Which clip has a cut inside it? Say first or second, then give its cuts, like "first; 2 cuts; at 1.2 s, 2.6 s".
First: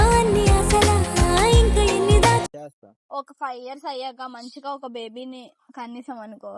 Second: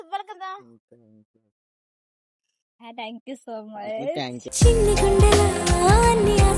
first; 1 cut; at 2.5 s